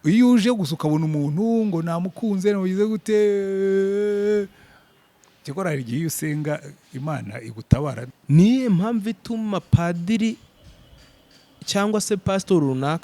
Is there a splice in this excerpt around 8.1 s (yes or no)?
yes